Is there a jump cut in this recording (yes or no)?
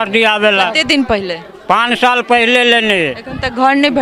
no